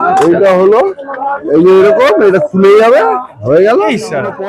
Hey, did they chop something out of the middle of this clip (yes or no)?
no